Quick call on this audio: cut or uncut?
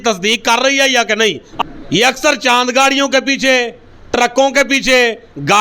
cut